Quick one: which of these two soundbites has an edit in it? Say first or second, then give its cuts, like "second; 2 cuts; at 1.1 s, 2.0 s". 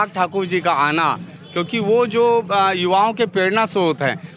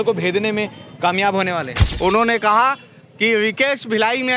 second; 1 cut; at 1.8 s